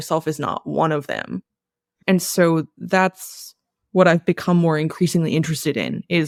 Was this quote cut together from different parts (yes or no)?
no